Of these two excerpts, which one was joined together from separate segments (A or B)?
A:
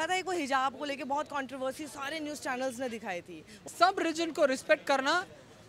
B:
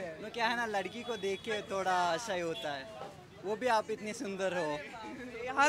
A